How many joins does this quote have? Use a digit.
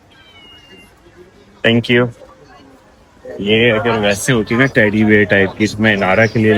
0